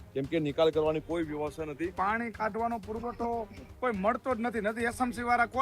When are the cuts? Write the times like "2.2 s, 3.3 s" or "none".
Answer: 1.9 s